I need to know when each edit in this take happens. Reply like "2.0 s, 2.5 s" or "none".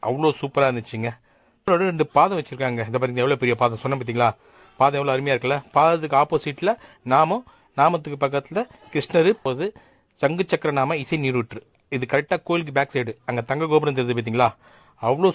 1.7 s, 9.4 s